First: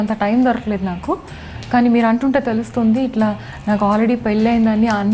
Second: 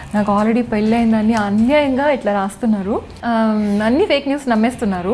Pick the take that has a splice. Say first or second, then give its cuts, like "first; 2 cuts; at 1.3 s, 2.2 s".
second; 1 cut; at 3.1 s